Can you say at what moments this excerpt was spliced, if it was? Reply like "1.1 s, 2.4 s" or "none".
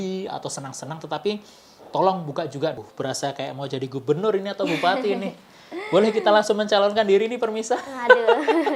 2.7 s